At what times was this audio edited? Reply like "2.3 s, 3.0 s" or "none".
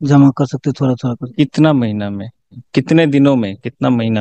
2.5 s